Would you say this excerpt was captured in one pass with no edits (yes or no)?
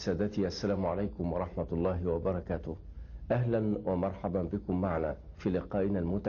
yes